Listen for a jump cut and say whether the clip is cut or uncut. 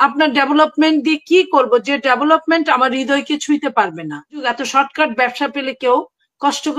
cut